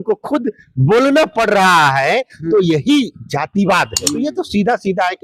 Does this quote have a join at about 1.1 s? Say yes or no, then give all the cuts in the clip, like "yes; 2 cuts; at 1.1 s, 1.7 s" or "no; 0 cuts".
no; 1 cut; at 4.0 s